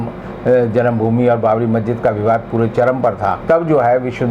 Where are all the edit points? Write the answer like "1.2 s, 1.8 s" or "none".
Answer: 3.4 s